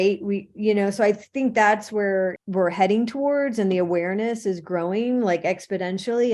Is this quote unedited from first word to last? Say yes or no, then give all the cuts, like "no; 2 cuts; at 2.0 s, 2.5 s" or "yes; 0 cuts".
no; 1 cut; at 2.4 s